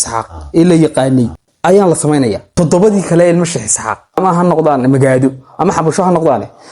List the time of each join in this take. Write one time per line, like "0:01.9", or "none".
0:01.4
0:02.5
0:04.2